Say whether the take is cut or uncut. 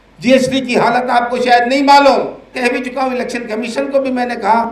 cut